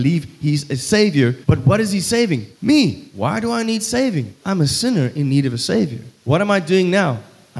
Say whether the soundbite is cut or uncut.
cut